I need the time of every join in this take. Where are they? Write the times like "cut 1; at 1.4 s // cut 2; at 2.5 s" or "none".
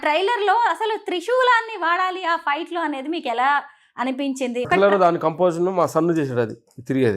cut 1; at 4.7 s

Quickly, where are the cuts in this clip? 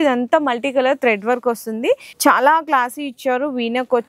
cut 1; at 2.1 s

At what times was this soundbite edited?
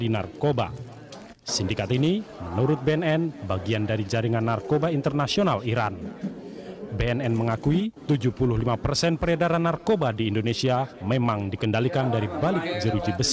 cut 1; at 3.9 s

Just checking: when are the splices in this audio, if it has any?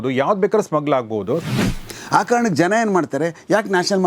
cut 1; at 1.5 s

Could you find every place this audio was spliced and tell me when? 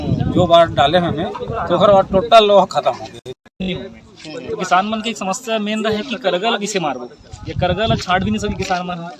cut 1; at 3.7 s

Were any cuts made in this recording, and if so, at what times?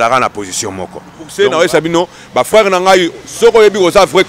cut 1; at 1.2 s

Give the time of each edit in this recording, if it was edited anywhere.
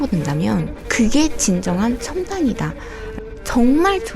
cut 1; at 3.0 s

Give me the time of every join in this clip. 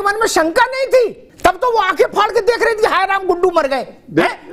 cut 1; at 1.2 s

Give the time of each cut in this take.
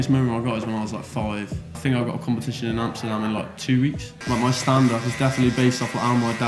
cut 1; at 1.8 s // cut 2; at 4.2 s

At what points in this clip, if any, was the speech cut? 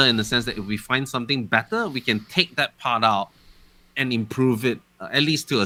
none

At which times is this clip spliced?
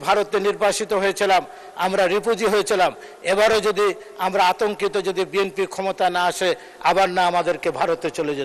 none

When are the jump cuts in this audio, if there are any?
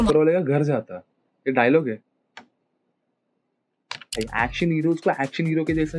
cut 1; at 4.2 s

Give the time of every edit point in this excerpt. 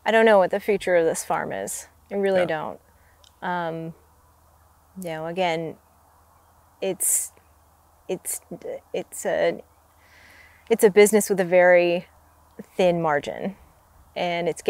none

